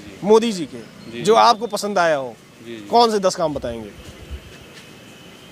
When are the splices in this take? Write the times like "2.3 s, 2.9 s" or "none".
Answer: none